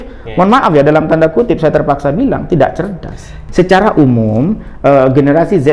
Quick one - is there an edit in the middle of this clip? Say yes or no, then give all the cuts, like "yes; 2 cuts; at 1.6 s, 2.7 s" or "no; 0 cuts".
yes; 1 cut; at 3.3 s